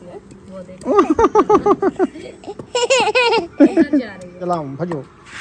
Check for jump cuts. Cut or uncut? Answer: cut